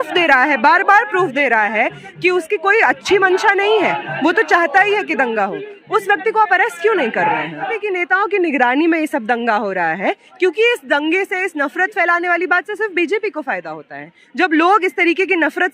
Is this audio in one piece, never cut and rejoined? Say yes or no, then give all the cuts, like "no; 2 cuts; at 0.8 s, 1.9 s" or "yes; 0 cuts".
no; 1 cut; at 7.7 s